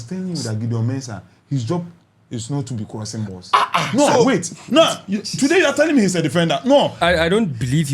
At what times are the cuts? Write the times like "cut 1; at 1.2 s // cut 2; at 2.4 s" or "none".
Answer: cut 1; at 7.0 s